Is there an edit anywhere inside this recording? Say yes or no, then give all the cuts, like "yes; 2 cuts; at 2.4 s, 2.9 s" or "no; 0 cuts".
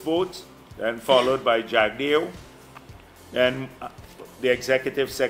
no; 0 cuts